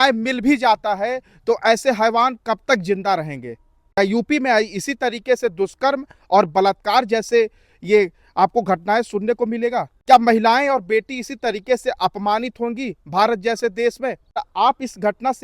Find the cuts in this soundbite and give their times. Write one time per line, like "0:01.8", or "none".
0:14.4

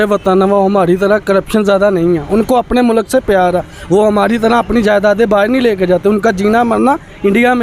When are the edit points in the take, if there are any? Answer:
none

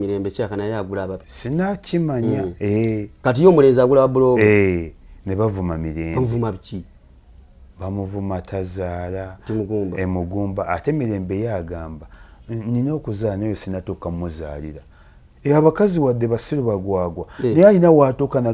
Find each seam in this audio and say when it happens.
0:01.3

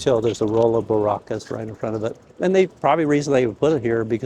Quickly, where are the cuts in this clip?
none

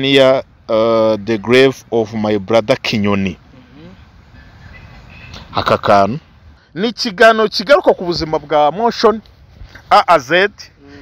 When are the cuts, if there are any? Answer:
0:06.6

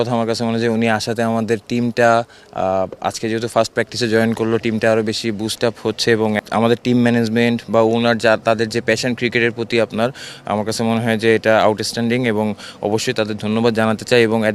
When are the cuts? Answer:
0:06.4

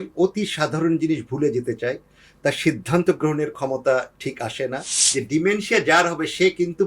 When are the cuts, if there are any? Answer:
0:04.9

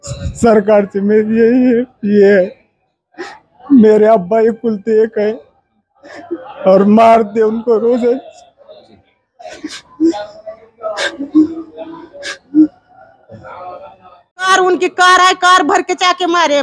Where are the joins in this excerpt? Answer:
0:14.5

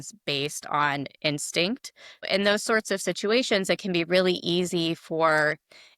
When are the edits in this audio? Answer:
0:02.2

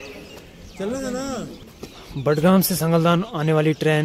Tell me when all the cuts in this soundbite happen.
0:01.6

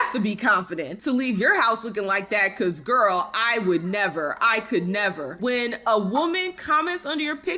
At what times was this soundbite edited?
0:05.3

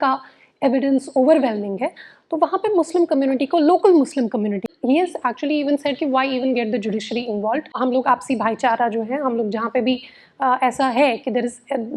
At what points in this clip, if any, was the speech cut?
0:04.7
0:07.8

